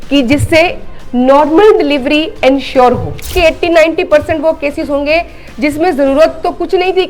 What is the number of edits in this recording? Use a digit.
1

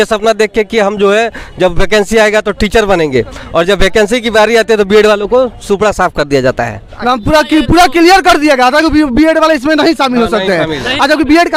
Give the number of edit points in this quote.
0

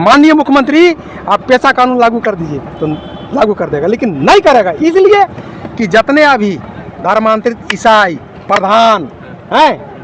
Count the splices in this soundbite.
0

